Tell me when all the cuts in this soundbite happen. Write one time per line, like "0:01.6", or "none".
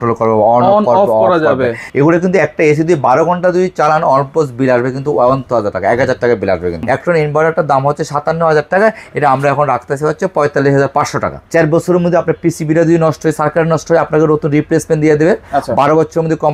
0:01.8
0:06.8
0:11.4